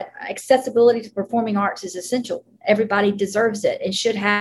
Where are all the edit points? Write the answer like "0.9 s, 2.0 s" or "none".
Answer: none